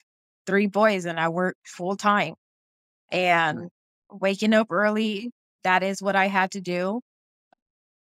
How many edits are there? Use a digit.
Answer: 2